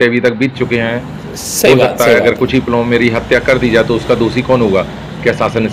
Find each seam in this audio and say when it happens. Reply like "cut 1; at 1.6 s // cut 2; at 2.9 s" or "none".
none